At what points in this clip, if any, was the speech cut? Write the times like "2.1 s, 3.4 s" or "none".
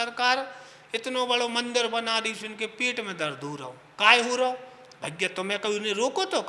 none